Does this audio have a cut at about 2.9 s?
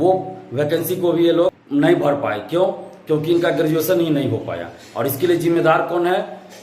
no; 1 cut; at 1.6 s

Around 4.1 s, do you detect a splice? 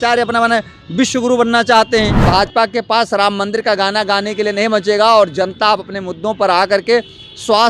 no; 1 cut; at 2.2 s

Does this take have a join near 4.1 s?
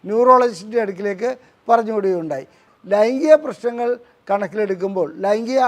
no; 1 cut; at 2.6 s

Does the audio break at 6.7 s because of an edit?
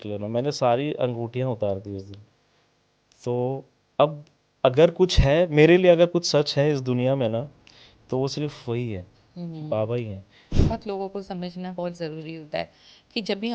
no; 1 cut; at 10.5 s

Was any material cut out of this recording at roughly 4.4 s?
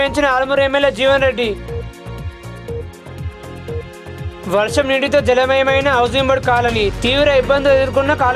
no; 0 cuts

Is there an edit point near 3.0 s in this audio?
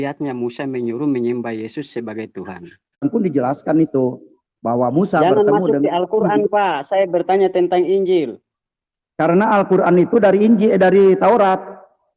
yes; 1 cut; at 3.0 s

